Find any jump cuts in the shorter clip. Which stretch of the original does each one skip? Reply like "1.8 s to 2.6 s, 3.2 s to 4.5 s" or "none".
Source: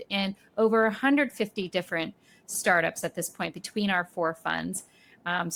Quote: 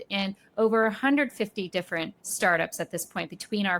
2.2 s to 2.4 s